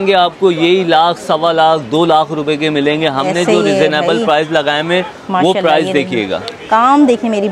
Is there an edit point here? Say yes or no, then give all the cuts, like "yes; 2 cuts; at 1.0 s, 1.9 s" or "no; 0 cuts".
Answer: no; 0 cuts